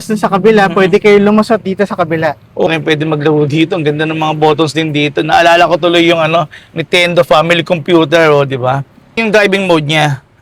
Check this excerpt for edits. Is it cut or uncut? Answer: cut